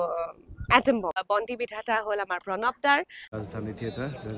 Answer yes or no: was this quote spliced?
yes